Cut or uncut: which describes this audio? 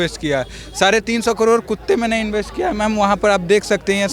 uncut